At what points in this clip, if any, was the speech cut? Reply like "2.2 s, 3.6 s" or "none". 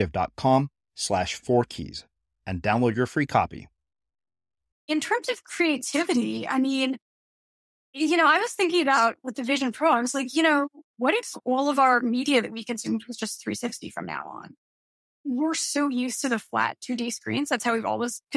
4.7 s, 15.1 s